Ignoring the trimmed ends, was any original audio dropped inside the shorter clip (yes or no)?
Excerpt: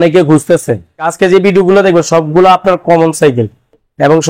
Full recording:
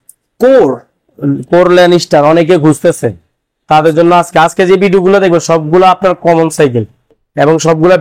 yes